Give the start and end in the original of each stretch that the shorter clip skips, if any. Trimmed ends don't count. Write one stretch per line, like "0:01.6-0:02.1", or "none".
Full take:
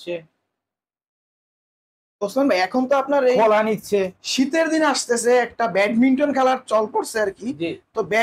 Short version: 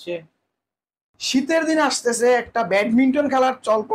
0:01.2-0:04.2